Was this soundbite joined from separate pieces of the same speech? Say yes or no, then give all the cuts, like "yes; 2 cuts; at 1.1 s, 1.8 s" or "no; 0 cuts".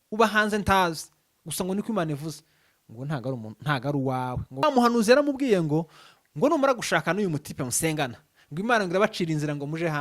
yes; 1 cut; at 4.6 s